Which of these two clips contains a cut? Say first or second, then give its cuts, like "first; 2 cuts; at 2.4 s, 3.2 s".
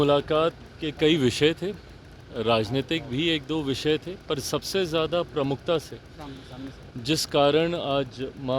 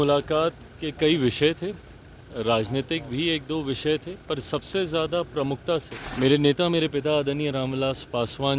second; 1 cut; at 6.0 s